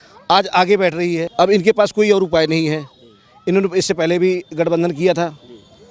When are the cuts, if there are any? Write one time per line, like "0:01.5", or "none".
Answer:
0:01.3